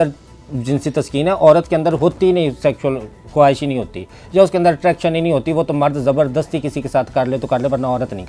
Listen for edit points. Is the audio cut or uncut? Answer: uncut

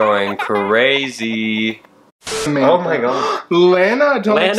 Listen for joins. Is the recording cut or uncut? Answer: cut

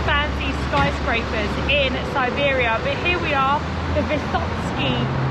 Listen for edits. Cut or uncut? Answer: uncut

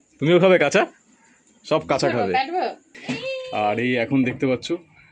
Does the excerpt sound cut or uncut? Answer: cut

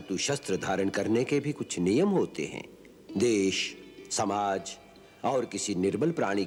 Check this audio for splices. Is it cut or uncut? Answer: uncut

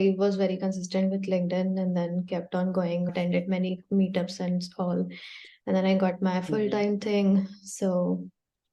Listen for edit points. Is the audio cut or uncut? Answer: uncut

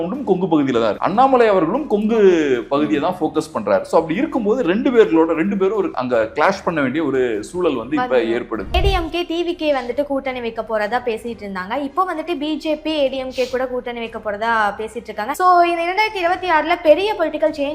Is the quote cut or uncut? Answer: cut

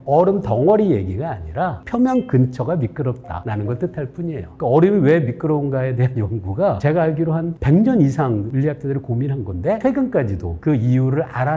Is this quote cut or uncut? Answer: cut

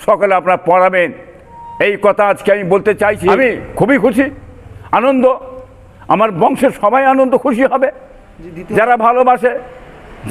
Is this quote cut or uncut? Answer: cut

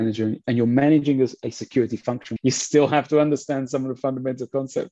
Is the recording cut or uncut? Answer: cut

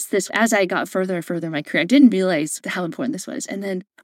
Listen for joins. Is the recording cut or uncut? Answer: cut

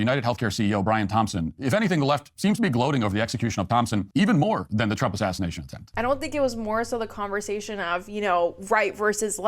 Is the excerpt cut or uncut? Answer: cut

